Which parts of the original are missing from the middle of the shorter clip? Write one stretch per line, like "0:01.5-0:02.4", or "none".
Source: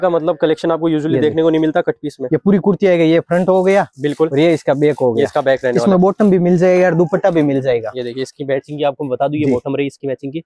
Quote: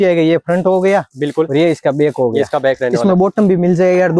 none